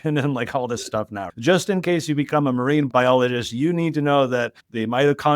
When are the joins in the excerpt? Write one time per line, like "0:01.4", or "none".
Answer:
0:01.3
0:02.9